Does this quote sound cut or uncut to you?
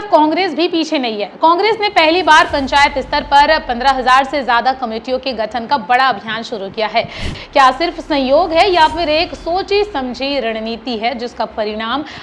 cut